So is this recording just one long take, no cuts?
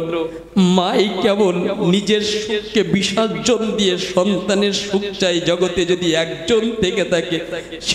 yes; 0 cuts

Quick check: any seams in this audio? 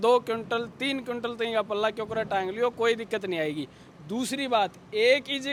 no; 0 cuts

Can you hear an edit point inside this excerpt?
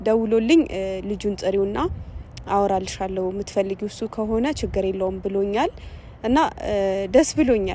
no; 0 cuts

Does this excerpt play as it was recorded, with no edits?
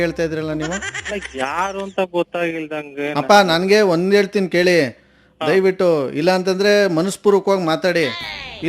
yes; 0 cuts

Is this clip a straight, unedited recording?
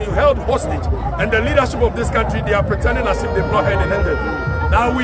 yes; 0 cuts

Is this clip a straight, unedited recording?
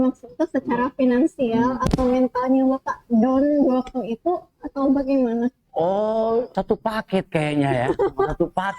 no; 1 cut; at 6.5 s

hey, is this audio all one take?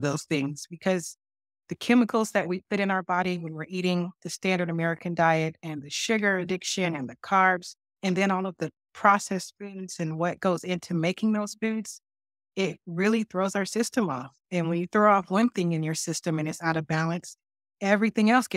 yes; 0 cuts

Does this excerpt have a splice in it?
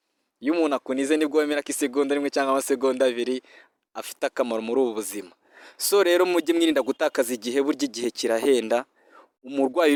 no; 0 cuts

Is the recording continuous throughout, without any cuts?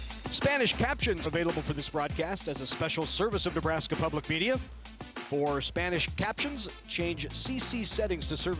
no; 1 cut; at 1.3 s

